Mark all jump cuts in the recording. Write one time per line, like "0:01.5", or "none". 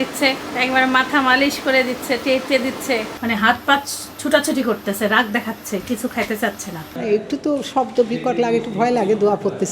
0:03.1
0:06.9

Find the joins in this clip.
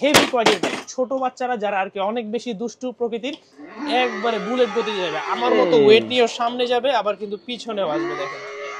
0:03.5

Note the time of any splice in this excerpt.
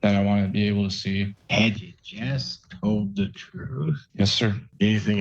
0:01.3
0:04.0

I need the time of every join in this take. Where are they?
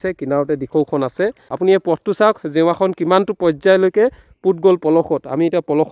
0:01.4

